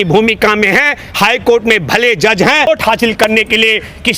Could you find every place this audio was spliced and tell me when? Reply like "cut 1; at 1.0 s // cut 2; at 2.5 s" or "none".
cut 1; at 2.7 s